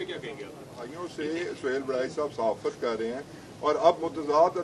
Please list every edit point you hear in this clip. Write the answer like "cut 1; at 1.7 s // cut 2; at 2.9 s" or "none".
cut 1; at 1.0 s